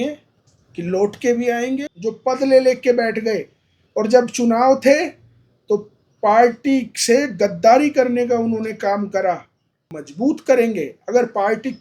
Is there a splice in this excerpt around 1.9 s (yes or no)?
yes